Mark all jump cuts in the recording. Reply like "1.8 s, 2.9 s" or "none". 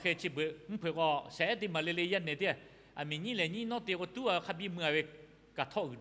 none